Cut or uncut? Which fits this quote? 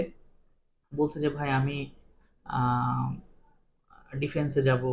uncut